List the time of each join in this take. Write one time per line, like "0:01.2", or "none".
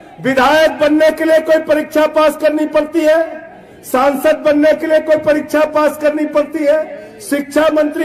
none